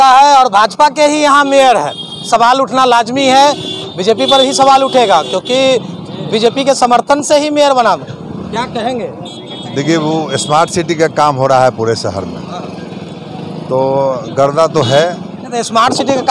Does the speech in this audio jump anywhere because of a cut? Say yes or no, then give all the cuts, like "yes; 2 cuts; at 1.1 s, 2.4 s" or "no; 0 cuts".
no; 0 cuts